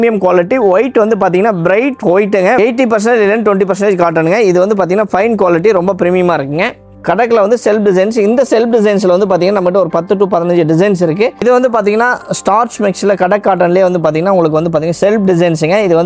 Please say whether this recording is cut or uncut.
cut